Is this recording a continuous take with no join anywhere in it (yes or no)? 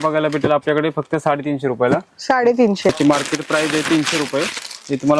no